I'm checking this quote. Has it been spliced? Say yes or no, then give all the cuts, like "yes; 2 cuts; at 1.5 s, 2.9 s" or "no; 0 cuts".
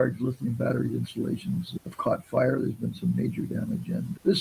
no; 0 cuts